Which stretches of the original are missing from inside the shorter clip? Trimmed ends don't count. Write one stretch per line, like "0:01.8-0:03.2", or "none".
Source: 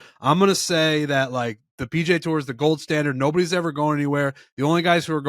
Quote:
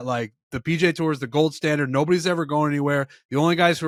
none